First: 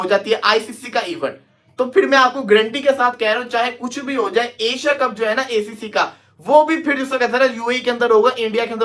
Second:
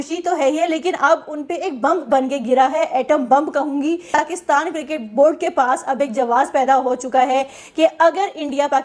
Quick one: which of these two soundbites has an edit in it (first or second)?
second